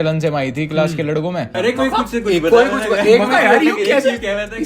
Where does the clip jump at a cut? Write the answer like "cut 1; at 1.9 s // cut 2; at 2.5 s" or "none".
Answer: cut 1; at 1.5 s